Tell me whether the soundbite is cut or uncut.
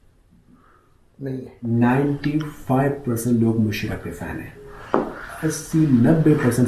cut